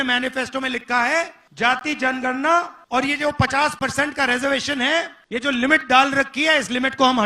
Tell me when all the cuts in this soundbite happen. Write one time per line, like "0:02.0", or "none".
0:01.4
0:02.8
0:05.2

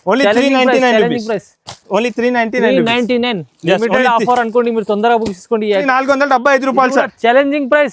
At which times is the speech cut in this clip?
0:05.8

